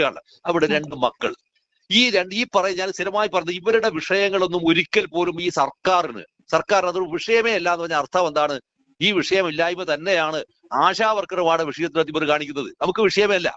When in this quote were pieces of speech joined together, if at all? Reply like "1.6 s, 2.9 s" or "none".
none